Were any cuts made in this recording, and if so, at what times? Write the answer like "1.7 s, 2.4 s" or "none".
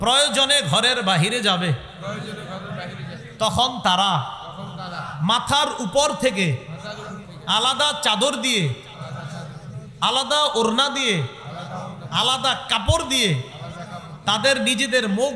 none